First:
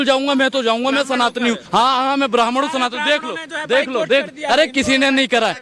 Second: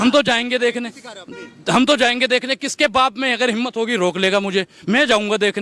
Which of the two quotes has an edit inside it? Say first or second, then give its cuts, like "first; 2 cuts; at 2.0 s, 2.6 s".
first; 1 cut; at 1.6 s